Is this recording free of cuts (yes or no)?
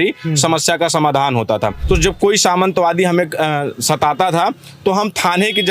no